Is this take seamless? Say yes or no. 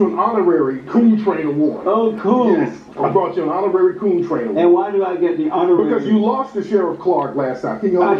no